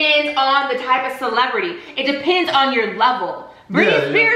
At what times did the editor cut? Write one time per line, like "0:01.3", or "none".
none